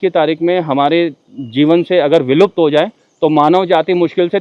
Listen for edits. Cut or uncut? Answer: uncut